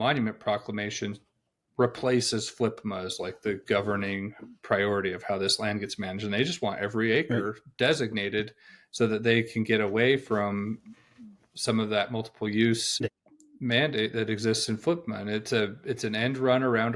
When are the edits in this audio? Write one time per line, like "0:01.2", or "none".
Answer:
0:13.0